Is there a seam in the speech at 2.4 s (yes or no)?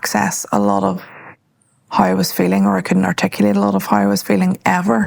no